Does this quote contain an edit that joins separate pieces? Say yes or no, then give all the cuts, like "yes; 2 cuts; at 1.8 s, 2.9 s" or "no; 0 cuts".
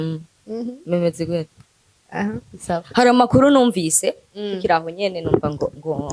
no; 0 cuts